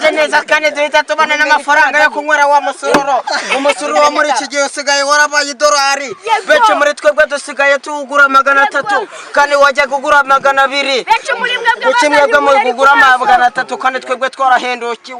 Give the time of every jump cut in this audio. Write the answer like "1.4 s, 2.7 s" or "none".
none